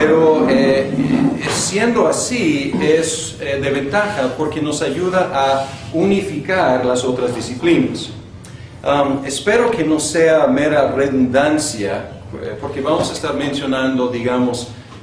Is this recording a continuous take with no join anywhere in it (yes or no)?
no